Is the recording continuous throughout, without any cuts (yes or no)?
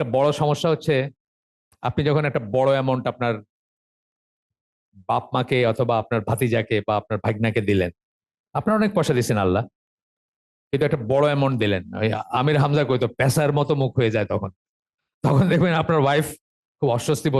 yes